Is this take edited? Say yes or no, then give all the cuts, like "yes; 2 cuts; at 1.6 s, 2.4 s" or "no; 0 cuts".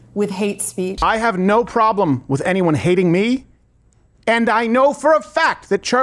yes; 1 cut; at 1.0 s